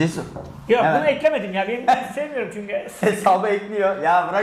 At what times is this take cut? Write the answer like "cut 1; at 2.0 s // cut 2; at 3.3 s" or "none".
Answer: none

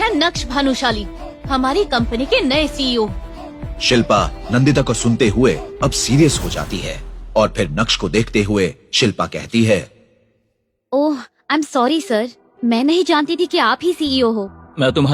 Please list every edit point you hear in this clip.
none

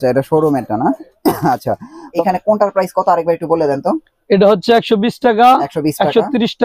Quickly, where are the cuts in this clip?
cut 1; at 2.2 s

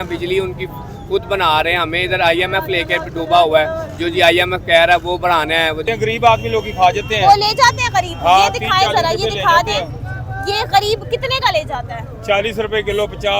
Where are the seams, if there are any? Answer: cut 1; at 5.8 s

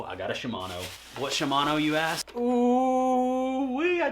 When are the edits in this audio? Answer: cut 1; at 2.2 s

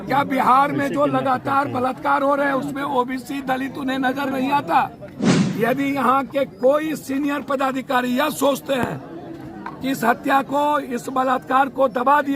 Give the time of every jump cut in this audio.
cut 1; at 5.2 s

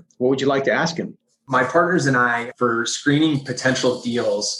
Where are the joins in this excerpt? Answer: cut 1; at 1.4 s // cut 2; at 2.5 s

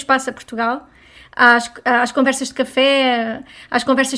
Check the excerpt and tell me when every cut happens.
none

